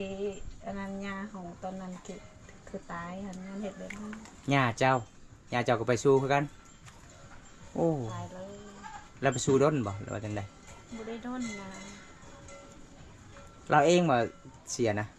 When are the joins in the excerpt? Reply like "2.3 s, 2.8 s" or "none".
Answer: none